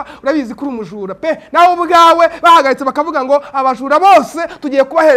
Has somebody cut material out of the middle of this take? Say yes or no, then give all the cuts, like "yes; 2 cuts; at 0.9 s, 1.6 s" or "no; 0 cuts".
no; 0 cuts